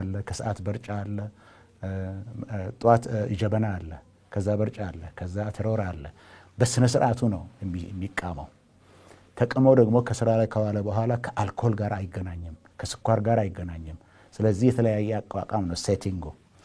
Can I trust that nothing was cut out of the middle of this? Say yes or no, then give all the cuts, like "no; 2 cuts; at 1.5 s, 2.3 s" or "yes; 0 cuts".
yes; 0 cuts